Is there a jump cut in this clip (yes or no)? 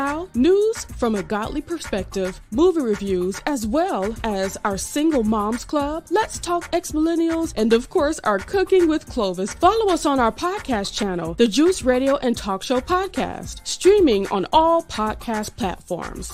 no